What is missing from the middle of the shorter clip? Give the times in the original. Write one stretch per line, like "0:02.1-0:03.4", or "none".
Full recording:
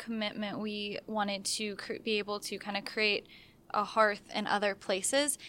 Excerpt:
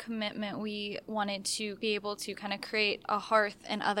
0:01.8-0:02.0
0:03.3-0:03.7